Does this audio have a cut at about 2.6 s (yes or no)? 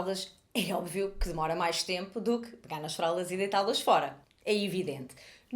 no